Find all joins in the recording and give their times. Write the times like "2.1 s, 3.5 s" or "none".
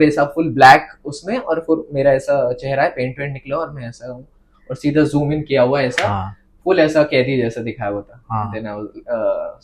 none